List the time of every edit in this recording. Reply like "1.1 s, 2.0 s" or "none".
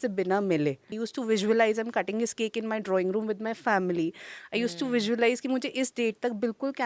1.0 s